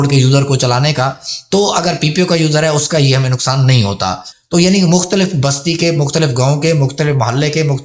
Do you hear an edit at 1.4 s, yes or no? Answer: no